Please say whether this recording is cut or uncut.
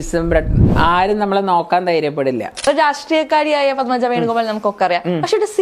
cut